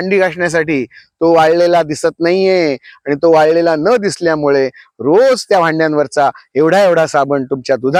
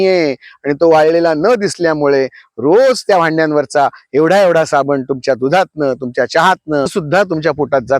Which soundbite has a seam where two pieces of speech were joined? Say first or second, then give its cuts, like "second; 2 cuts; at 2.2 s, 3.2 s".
second; 1 cut; at 6.9 s